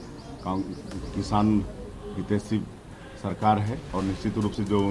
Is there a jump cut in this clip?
yes; 1 cut; at 3.8 s

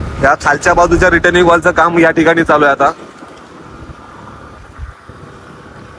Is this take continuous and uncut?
yes; 0 cuts

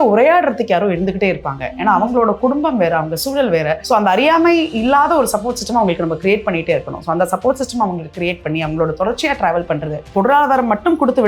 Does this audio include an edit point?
yes; 2 cuts; at 3.8 s, 10.1 s

